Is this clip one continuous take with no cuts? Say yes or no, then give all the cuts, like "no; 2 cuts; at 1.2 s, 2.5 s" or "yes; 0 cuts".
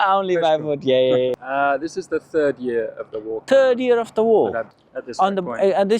no; 3 cuts; at 1.4 s, 3.3 s, 4.8 s